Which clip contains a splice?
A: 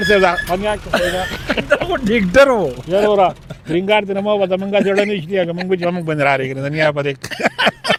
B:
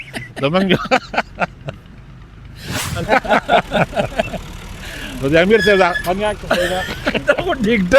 B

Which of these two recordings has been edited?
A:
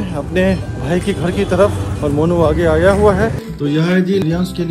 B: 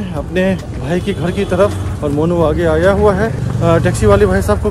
A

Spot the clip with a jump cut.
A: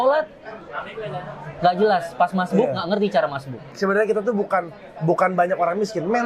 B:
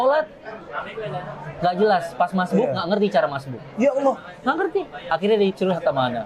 A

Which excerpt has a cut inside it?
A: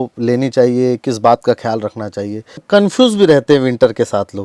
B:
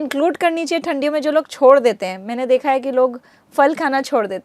A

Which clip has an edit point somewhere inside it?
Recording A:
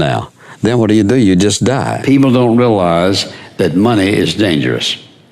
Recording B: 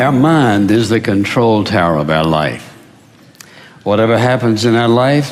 A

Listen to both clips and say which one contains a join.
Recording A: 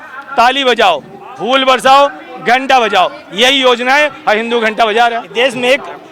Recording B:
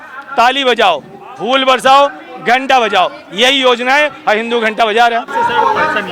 A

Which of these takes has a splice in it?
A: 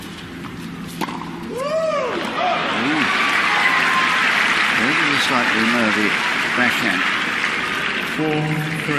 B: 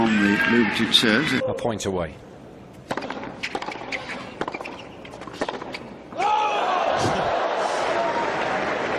A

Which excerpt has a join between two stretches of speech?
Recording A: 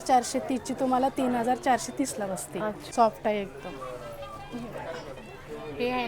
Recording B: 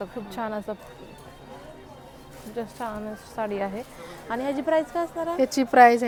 A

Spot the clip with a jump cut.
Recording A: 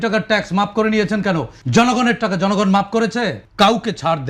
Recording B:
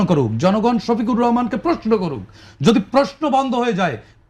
A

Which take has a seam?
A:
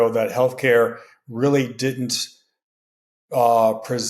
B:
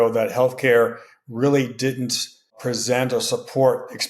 B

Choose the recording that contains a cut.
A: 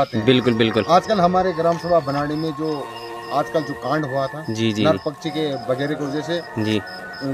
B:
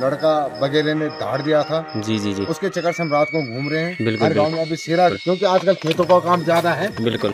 B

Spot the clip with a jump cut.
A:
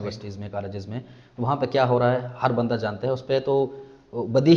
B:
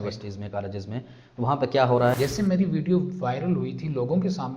B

